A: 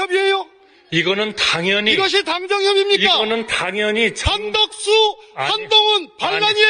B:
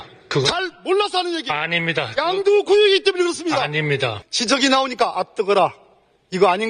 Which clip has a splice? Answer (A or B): B